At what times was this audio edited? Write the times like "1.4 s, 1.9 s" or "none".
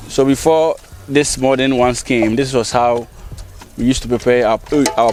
none